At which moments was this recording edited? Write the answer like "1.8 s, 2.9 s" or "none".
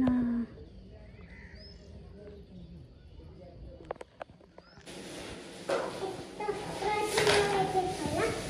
5.0 s